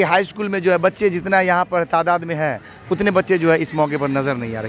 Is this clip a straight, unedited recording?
yes; 0 cuts

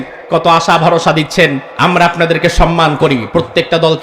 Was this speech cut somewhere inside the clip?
yes; 1 cut; at 1.7 s

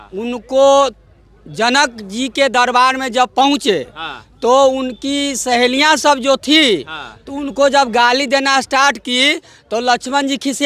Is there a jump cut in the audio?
no; 0 cuts

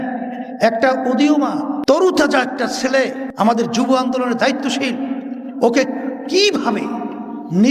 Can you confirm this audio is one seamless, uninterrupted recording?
no; 2 cuts; at 2.0 s, 3.2 s

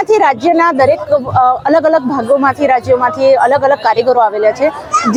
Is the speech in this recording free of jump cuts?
yes; 0 cuts

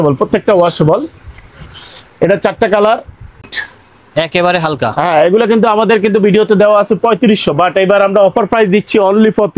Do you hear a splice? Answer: yes; 1 cut; at 3.6 s

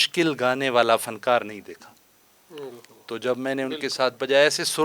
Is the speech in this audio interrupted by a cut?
no; 0 cuts

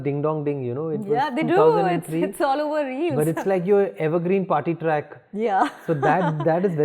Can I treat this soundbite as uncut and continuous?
yes; 0 cuts

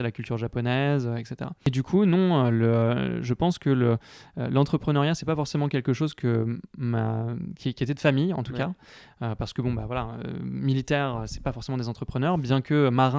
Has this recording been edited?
no; 0 cuts

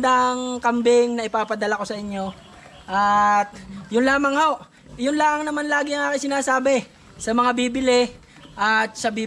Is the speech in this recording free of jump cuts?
yes; 0 cuts

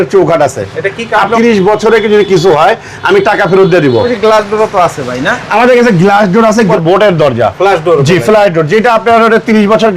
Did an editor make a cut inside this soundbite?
yes; 3 cuts; at 1.3 s, 4.1 s, 6.7 s

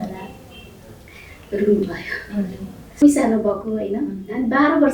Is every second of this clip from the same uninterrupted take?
no; 1 cut; at 3.0 s

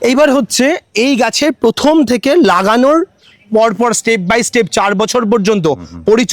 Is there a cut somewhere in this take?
no; 0 cuts

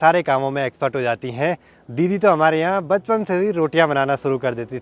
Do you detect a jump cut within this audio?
no; 0 cuts

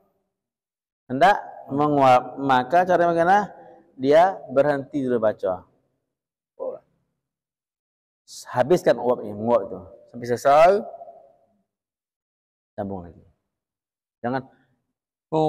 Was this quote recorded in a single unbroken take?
yes; 0 cuts

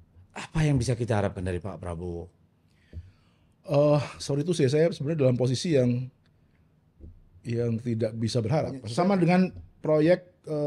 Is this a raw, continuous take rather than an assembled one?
no; 1 cut; at 8.9 s

